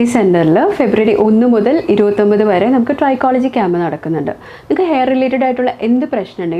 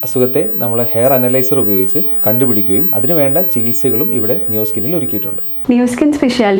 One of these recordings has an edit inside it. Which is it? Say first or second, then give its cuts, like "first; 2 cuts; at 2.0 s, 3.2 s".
second; 1 cut; at 5.5 s